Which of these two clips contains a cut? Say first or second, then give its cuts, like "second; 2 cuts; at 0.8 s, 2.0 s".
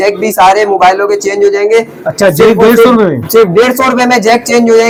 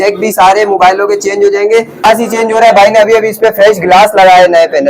second; 1 cut; at 2.0 s